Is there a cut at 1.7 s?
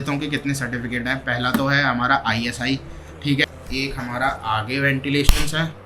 no; 1 cut; at 3.4 s

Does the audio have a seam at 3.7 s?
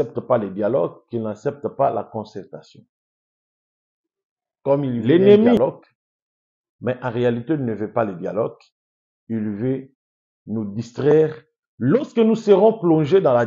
no; 1 cut; at 5.6 s

